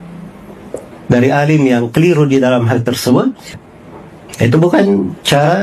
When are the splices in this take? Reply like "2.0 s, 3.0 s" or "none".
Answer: 3.5 s